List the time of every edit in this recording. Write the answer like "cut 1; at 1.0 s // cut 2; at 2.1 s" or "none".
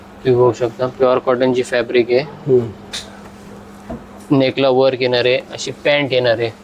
none

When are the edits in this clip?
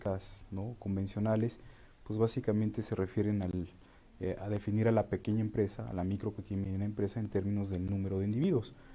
cut 1; at 2.6 s

